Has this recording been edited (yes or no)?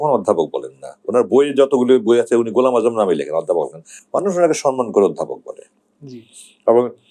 no